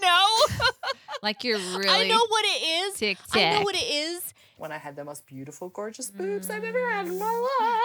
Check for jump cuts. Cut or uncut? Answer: cut